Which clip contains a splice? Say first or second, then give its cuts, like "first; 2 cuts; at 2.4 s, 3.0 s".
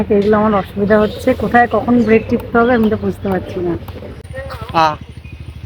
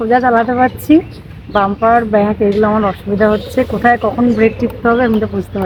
first; 1 cut; at 4.3 s